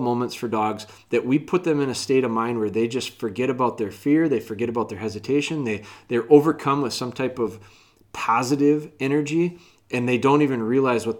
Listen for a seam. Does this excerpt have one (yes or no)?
no